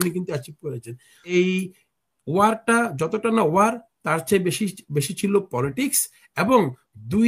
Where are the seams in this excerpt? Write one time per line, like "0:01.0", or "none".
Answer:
0:01.3